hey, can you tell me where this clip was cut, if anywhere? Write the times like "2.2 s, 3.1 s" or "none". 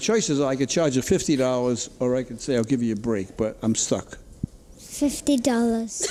none